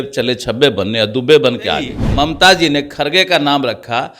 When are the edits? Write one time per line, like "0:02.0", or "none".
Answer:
0:02.0